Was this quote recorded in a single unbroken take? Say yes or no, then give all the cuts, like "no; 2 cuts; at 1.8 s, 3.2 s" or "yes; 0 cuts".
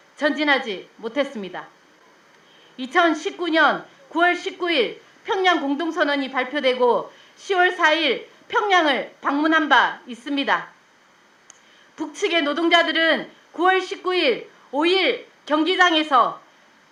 yes; 0 cuts